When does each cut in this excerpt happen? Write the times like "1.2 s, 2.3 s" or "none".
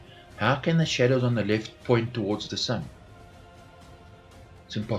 none